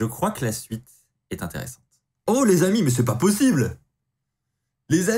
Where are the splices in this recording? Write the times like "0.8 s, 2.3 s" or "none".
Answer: 2.2 s